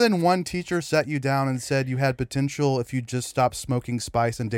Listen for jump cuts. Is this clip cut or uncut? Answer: uncut